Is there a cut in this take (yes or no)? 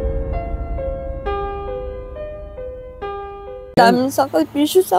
yes